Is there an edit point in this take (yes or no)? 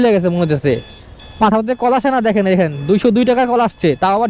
no